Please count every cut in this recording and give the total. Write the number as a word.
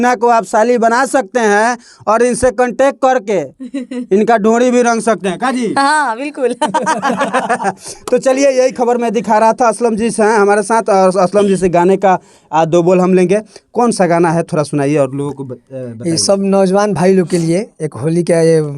zero